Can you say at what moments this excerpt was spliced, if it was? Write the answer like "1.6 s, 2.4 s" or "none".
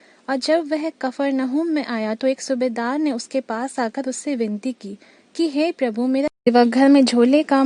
6.5 s